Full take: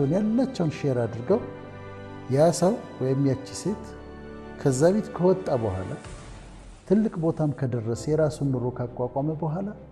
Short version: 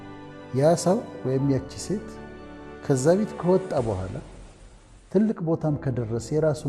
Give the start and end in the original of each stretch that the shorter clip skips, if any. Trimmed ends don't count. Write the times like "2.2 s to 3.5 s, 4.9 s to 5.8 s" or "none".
none